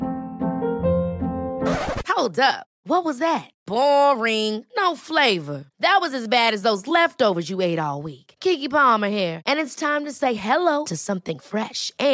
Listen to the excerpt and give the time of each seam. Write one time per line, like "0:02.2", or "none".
none